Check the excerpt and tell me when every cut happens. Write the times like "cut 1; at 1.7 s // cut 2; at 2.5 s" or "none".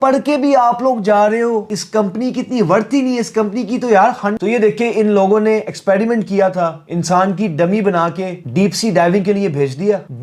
cut 1; at 4.4 s